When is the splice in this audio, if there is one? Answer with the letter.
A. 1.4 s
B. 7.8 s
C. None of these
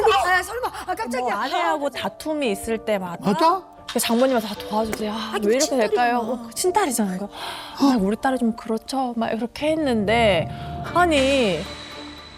A